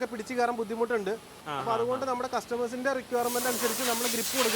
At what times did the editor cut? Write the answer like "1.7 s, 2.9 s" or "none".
1.4 s